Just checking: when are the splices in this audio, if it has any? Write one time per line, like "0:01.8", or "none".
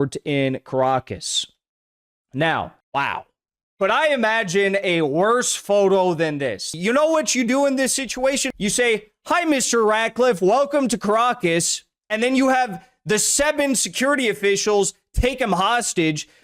0:06.7
0:08.4